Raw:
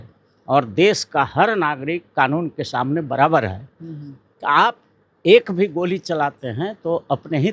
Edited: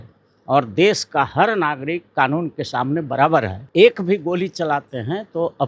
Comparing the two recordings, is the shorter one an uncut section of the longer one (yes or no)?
no